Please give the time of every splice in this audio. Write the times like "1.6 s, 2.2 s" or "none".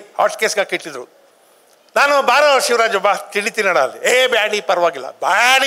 none